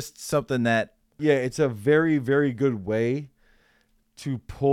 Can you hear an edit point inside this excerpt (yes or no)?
yes